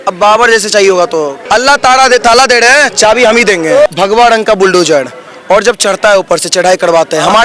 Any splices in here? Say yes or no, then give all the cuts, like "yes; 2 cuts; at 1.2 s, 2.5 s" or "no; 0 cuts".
yes; 2 cuts; at 1.4 s, 3.9 s